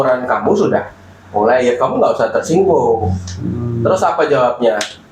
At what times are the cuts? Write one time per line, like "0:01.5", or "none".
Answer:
none